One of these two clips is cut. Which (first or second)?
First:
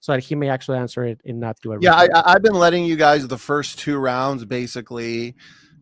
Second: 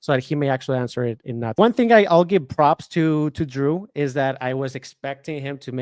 second